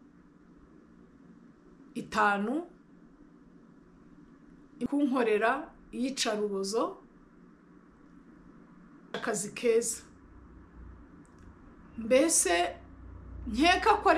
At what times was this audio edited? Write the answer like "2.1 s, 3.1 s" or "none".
4.8 s, 9.1 s